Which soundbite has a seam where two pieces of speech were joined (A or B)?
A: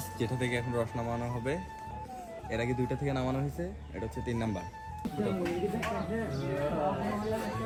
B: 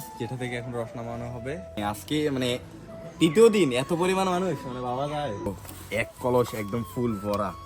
B